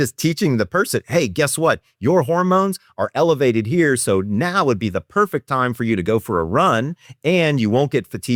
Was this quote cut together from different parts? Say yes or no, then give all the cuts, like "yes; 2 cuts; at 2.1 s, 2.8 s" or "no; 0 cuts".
no; 0 cuts